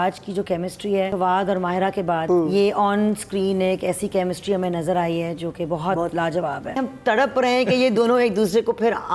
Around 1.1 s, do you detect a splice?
yes; 3 cuts; at 1.1 s, 2.2 s, 6.8 s

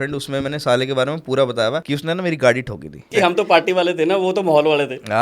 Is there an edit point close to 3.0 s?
yes; 2 cuts; at 1.8 s, 3.0 s

